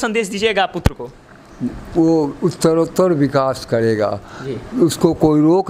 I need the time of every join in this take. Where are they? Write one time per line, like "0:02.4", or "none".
none